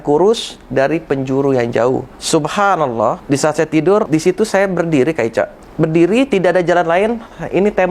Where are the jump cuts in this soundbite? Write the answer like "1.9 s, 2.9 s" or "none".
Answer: 2.1 s, 3.2 s, 4.1 s, 5.6 s